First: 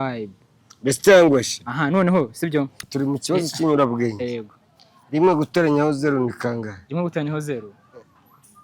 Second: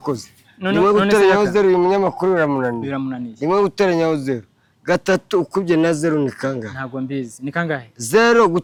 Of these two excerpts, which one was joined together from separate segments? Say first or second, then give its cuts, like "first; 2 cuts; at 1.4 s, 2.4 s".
first; 1 cut; at 2.8 s